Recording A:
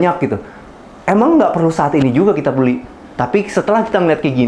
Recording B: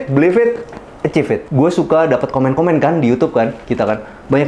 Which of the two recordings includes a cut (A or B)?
B